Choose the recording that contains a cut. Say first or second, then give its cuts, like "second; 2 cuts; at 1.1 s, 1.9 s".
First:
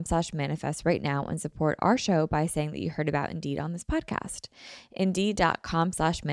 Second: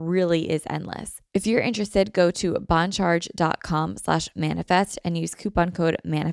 second; 1 cut; at 1.1 s